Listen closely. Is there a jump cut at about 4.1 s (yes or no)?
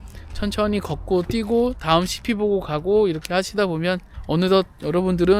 yes